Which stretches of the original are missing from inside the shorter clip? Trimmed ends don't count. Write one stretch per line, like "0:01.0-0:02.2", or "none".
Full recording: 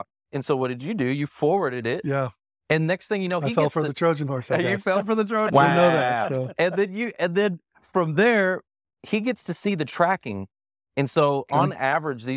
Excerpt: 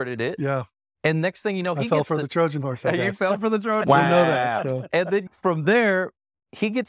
0:07.0-0:07.8